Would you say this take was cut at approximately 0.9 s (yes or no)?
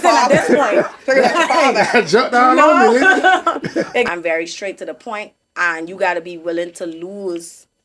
no